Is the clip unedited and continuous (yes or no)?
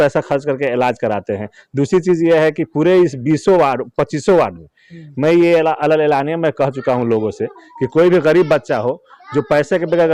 yes